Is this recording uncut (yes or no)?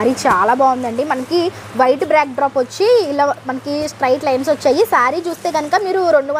yes